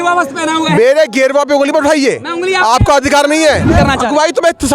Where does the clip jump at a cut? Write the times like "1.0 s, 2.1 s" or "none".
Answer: 3.7 s